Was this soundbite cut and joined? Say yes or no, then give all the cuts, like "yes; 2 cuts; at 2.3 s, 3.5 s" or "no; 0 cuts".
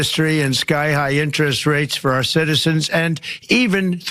no; 0 cuts